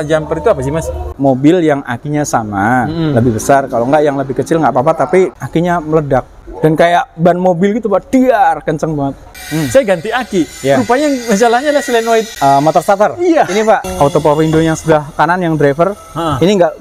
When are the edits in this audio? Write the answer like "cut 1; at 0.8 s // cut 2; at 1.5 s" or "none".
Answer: cut 1; at 1.1 s // cut 2; at 5.4 s // cut 3; at 6.4 s // cut 4; at 9.4 s // cut 5; at 12.3 s // cut 6; at 13.8 s